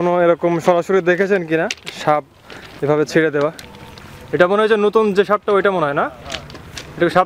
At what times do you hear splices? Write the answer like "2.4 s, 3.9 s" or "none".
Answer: 3.6 s